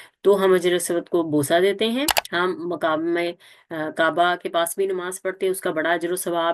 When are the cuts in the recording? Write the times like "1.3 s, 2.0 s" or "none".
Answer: 2.2 s